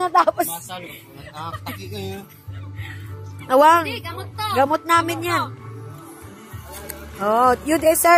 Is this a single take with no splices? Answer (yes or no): yes